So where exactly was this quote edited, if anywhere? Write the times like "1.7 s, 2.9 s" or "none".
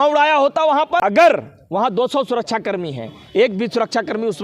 1.0 s